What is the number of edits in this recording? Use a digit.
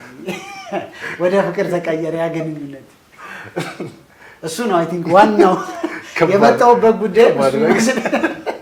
0